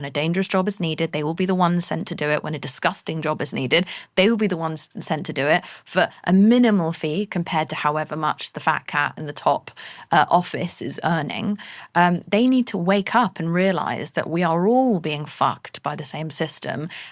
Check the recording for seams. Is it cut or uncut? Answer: uncut